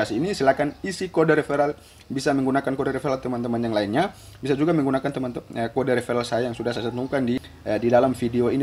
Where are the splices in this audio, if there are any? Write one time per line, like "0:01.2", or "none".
0:07.4